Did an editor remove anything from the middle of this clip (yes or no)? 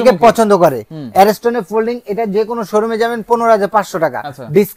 no